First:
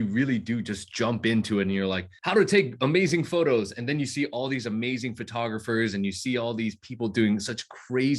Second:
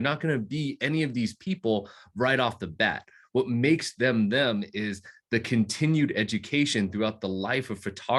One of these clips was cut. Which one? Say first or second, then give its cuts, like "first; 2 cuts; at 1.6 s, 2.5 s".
first; 1 cut; at 2.1 s